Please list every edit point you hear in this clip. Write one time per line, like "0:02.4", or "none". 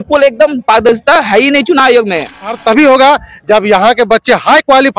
0:02.6